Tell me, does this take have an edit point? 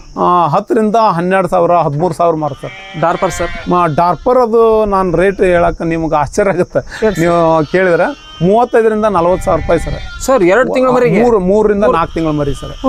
no; 0 cuts

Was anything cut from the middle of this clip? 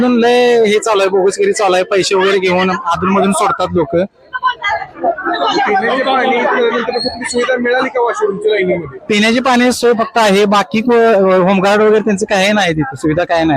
no; 0 cuts

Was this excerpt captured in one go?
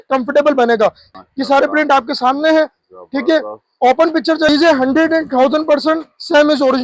no; 2 cuts; at 1.1 s, 4.5 s

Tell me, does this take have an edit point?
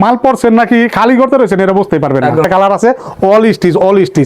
yes; 1 cut; at 2.5 s

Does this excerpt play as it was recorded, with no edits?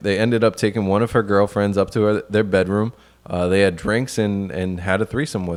yes; 0 cuts

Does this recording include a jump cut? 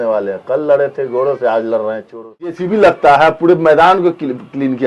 yes; 1 cut; at 2.6 s

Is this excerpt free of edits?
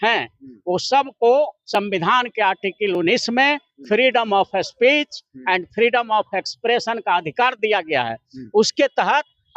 yes; 0 cuts

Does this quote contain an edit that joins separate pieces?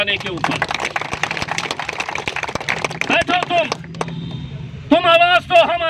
no; 0 cuts

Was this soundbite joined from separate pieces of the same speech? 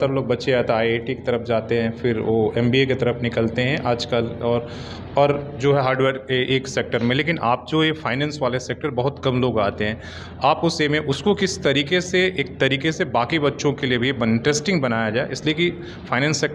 no; 0 cuts

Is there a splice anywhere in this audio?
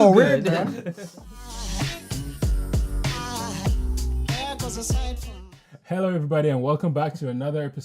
yes; 1 cut; at 5.0 s

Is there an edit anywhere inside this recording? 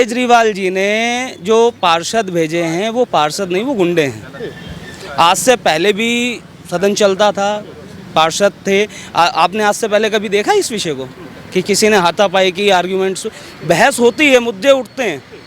no; 0 cuts

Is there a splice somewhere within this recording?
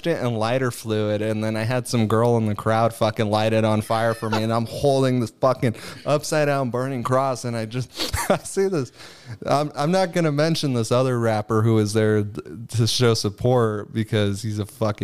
no; 0 cuts

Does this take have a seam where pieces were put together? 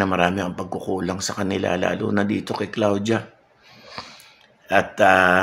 no; 0 cuts

